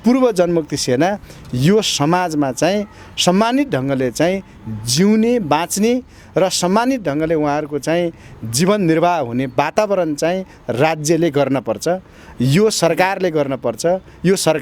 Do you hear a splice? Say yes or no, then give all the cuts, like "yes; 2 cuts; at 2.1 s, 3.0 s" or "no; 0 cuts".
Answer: no; 0 cuts